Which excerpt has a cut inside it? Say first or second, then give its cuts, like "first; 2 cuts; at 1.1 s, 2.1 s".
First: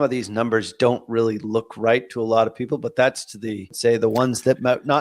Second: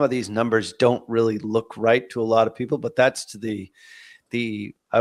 first; 1 cut; at 3.7 s